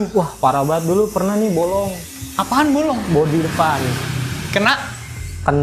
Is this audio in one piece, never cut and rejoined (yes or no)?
yes